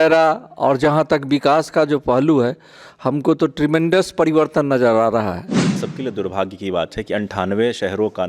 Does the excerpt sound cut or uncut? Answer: cut